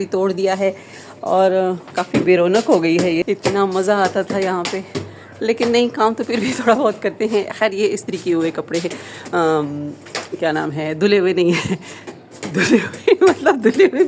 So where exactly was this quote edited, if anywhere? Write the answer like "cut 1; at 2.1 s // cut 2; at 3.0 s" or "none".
none